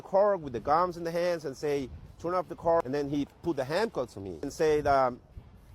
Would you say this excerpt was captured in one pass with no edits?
no; 2 cuts; at 2.8 s, 4.5 s

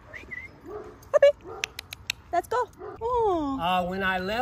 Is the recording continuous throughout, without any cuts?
no; 1 cut; at 2.8 s

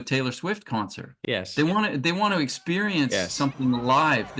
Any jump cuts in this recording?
yes; 1 cut; at 1.1 s

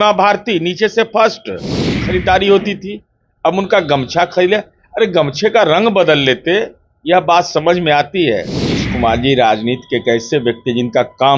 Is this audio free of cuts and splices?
no; 2 cuts; at 1.9 s, 8.9 s

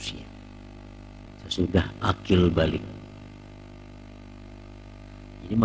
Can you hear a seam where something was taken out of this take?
yes; 1 cut; at 1.3 s

